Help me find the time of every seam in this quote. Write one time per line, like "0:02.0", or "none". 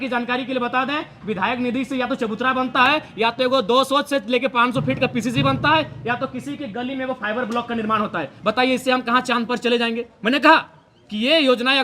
none

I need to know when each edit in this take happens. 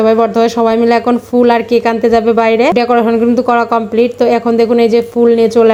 none

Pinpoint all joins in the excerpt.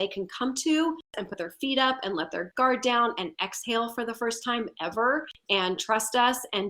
0:01.2
0:05.3

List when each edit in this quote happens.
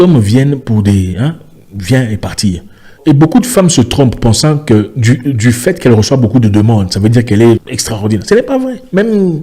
0:03.0
0:07.7

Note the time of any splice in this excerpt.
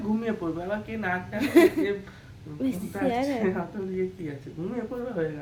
none

